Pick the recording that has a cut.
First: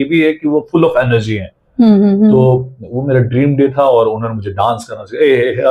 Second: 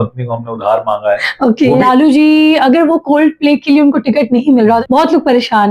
second; 2 cuts; at 1.8 s, 4.8 s

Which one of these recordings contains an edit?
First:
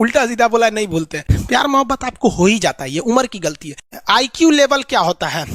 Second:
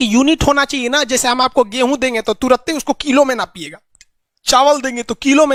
first; 2 cuts; at 1.3 s, 3.7 s

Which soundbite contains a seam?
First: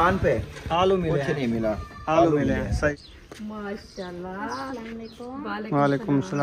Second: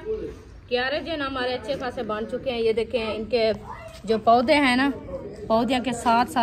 first; 1 cut; at 2.9 s

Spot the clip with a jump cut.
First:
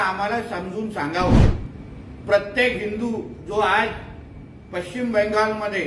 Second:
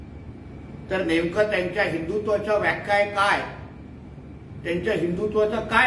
first; 1 cut; at 1.5 s

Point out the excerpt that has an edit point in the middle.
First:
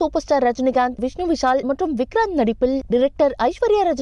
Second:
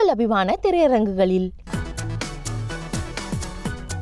second; 1 cut; at 1.6 s

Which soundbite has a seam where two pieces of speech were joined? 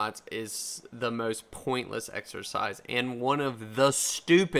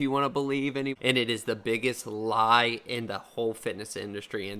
second; 1 cut; at 1.0 s

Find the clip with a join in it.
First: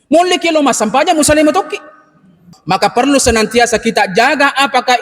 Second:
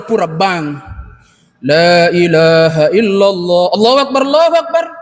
first; 1 cut; at 2.5 s

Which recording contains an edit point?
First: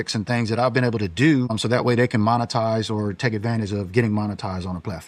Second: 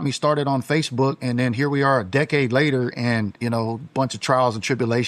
first; 1 cut; at 1.6 s

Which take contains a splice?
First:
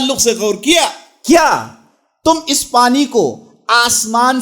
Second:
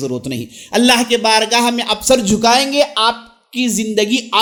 first; 1 cut; at 1.1 s

